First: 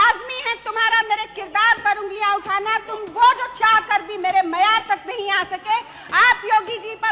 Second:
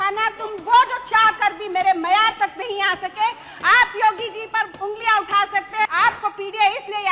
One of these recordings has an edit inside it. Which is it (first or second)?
second